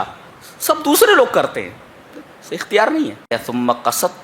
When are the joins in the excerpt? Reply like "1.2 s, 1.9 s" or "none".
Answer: 3.3 s